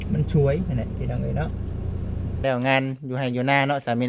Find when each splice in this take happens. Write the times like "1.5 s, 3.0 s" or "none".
2.4 s